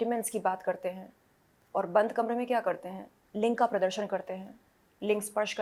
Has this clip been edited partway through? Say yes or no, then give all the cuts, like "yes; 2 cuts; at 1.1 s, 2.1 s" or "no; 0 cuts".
no; 0 cuts